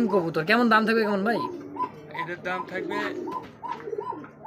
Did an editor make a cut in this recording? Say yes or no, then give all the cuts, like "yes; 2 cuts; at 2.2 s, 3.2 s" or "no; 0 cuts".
no; 0 cuts